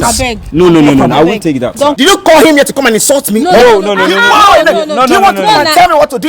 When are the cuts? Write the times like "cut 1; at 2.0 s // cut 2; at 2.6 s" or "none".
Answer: cut 1; at 2.0 s